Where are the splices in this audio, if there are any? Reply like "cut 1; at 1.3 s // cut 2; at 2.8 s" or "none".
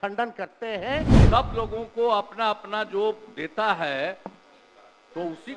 cut 1; at 1.2 s